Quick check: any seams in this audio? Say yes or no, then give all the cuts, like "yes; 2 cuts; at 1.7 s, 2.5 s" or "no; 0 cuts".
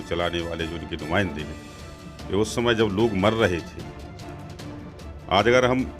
yes; 2 cuts; at 3.7 s, 5.2 s